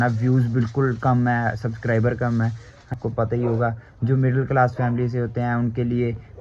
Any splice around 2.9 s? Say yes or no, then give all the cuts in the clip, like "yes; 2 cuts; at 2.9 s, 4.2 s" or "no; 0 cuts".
yes; 1 cut; at 2.9 s